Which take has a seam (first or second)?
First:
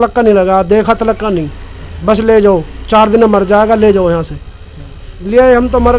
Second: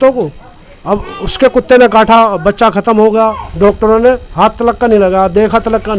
second